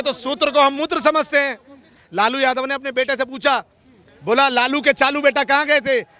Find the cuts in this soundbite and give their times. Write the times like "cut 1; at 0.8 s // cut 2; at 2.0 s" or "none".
cut 1; at 1.9 s